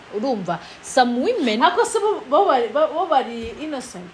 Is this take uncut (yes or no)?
yes